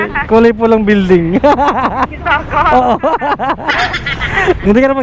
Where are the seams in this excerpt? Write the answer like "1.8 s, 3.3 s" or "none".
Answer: 4.1 s